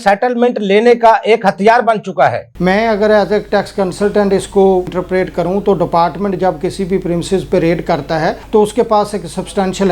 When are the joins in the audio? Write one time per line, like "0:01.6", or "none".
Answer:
none